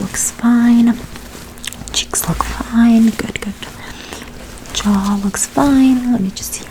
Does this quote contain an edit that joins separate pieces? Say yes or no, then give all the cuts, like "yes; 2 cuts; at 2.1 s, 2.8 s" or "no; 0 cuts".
no; 0 cuts